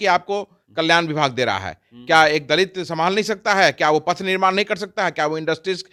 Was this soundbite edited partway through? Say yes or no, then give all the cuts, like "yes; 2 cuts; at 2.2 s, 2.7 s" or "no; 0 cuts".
no; 0 cuts